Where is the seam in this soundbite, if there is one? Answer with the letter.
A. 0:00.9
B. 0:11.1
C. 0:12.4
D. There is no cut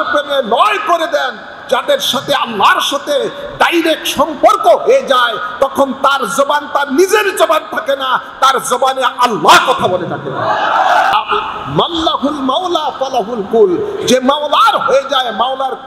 B